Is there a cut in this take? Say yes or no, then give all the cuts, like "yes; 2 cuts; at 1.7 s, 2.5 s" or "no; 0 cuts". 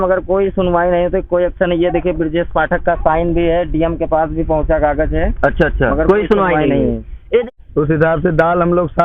yes; 1 cut; at 7.4 s